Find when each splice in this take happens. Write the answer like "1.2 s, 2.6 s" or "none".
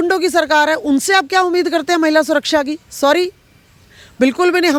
none